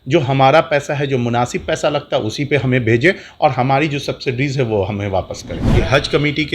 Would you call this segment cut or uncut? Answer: cut